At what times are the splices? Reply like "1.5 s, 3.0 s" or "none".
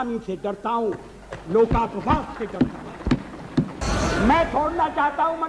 3.8 s